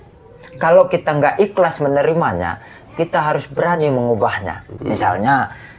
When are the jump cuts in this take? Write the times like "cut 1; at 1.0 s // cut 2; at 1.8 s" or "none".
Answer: cut 1; at 4.7 s